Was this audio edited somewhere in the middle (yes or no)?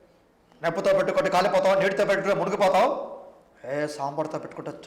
no